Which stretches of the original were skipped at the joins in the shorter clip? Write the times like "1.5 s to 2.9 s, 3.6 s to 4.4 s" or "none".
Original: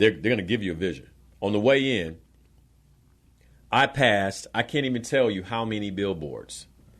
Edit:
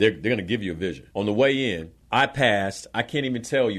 1.0 s to 1.3 s, 2.2 s to 3.5 s